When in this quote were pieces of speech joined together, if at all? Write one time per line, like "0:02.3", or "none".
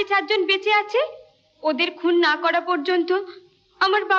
none